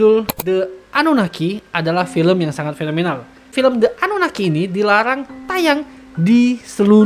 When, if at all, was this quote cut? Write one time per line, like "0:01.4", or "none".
0:03.5